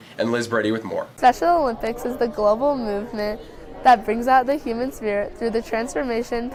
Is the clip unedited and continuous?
yes; 0 cuts

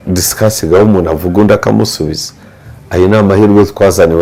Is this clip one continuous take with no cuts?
yes; 0 cuts

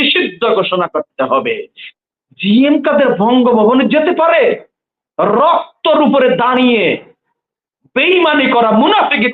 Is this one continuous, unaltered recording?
no; 1 cut; at 1.9 s

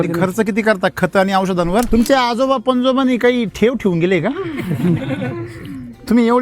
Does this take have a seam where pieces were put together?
yes; 1 cut; at 1.9 s

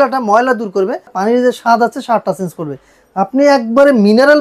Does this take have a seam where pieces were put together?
yes; 1 cut; at 1.1 s

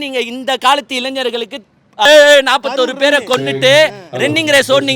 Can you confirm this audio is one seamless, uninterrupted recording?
no; 1 cut; at 2.1 s

